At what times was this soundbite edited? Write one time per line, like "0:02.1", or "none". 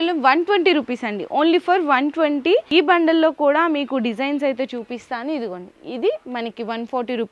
0:02.7